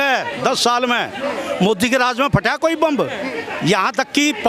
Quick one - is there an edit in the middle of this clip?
yes; 1 cut; at 3.3 s

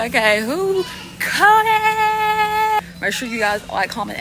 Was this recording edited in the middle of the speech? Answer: yes; 1 cut; at 2.8 s

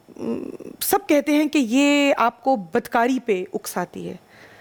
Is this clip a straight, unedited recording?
yes; 0 cuts

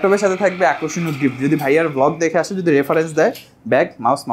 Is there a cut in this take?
no; 0 cuts

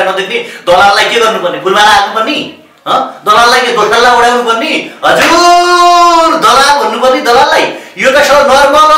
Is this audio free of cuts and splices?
yes; 0 cuts

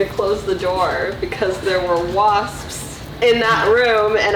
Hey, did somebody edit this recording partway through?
yes; 1 cut; at 2.5 s

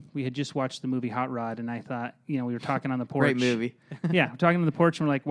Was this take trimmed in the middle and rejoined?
no; 0 cuts

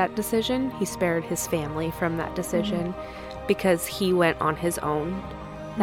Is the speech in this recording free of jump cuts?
yes; 0 cuts

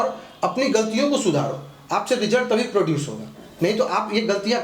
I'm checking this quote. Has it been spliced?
no; 0 cuts

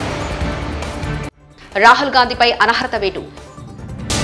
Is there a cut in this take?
no; 0 cuts

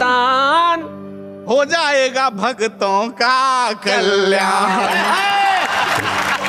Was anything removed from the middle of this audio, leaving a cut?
no; 0 cuts

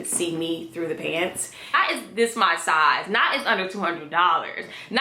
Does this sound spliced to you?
yes; 1 cut; at 1.7 s

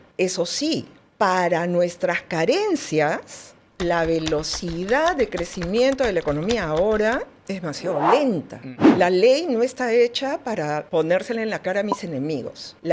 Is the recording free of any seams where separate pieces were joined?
no; 1 cut; at 8.7 s

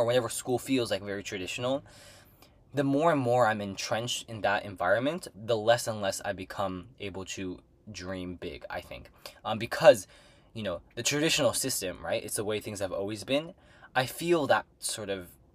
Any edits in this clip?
no; 0 cuts

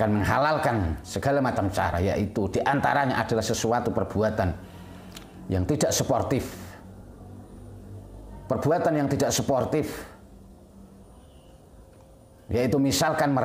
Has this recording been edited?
no; 0 cuts

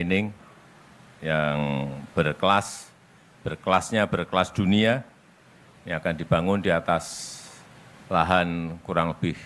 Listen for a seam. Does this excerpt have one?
no; 0 cuts

